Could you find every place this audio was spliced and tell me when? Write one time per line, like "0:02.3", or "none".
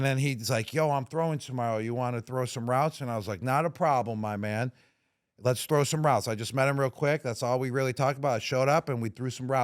none